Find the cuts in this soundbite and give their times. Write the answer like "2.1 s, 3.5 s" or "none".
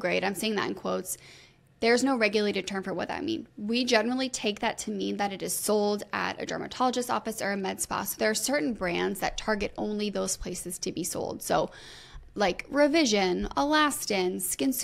none